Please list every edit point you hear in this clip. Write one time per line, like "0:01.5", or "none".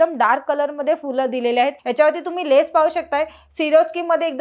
0:01.8